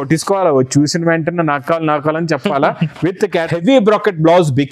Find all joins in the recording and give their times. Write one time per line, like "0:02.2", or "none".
0:03.5